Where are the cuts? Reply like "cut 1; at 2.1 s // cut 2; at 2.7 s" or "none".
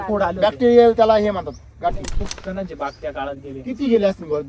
cut 1; at 2.2 s